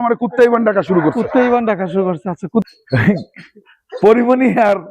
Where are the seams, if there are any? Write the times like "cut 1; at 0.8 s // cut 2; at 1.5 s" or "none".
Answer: cut 1; at 2.7 s